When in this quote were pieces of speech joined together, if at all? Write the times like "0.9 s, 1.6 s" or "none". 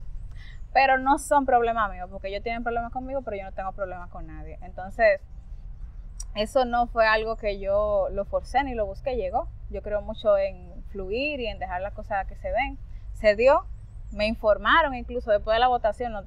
none